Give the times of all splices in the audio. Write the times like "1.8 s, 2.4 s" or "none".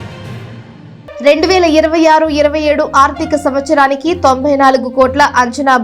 1.2 s